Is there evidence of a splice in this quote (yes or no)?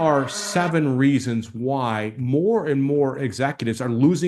no